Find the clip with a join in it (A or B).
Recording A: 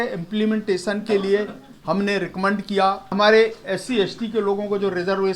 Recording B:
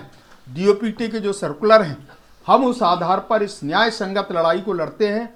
A